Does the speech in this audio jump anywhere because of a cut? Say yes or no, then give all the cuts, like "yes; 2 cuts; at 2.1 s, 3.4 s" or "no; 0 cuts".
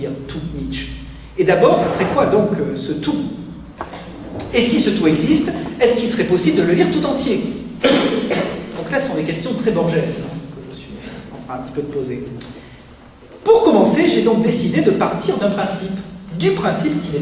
no; 0 cuts